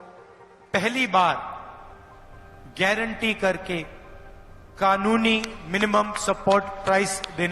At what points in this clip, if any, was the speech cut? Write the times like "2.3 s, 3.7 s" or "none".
none